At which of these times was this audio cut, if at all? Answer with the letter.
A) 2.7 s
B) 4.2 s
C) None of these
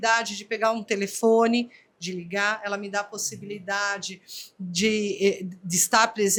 C